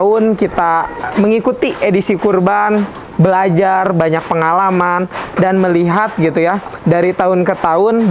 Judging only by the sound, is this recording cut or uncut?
uncut